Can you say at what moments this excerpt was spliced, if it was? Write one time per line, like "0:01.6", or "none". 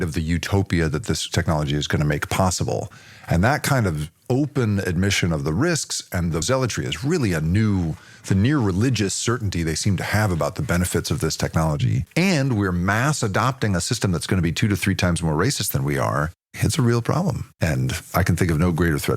0:12.0
0:17.5

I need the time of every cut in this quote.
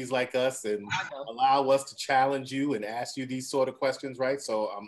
none

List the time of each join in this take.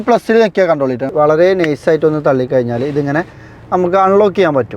0:01.0

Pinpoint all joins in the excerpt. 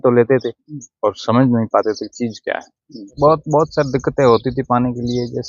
0:03.1

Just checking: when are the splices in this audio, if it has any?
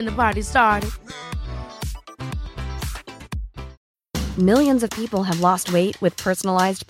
0:03.7

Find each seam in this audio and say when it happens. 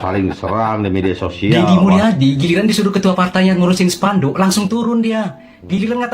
0:01.6

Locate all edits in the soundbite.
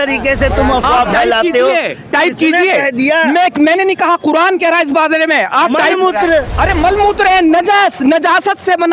none

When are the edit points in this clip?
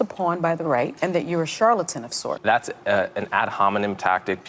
0:00.9
0:02.2

